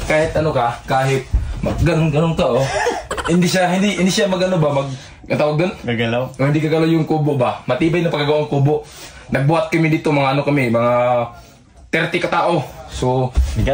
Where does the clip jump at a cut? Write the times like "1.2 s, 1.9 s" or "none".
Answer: none